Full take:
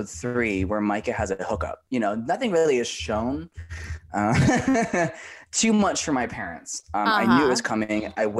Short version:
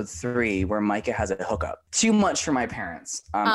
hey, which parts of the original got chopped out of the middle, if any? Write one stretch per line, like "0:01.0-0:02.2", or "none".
0:01.7-0:05.3